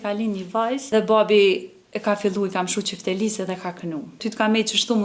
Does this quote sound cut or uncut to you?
cut